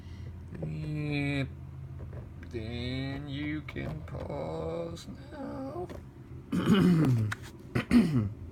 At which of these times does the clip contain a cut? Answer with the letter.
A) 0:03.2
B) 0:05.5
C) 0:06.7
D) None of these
C